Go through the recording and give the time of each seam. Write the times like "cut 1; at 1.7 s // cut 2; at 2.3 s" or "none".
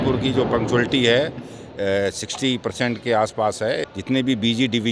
cut 1; at 3.9 s